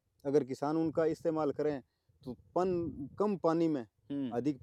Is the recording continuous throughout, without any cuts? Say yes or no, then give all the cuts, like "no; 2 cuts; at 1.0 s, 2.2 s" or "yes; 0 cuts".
yes; 0 cuts